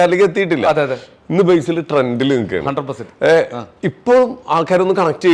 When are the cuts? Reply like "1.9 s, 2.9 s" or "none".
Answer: none